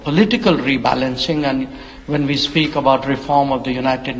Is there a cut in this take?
no; 0 cuts

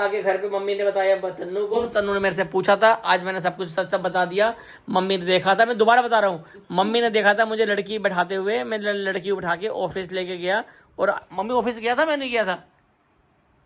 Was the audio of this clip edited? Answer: no; 0 cuts

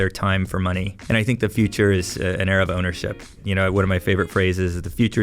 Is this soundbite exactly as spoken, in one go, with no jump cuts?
no; 2 cuts; at 1.0 s, 3.4 s

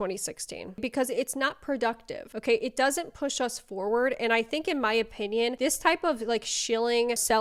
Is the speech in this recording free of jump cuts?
yes; 0 cuts

